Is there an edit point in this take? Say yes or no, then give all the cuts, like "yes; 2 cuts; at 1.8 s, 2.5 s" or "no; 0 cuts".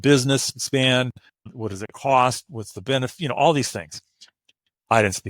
yes; 1 cut; at 1.5 s